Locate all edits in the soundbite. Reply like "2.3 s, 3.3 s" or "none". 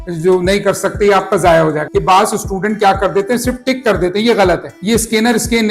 1.8 s, 4.7 s

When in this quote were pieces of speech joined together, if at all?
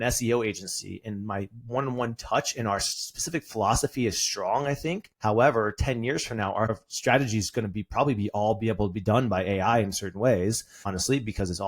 5.1 s, 6.8 s, 10.7 s

